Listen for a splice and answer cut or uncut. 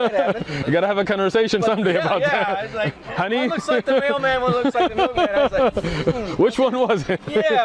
uncut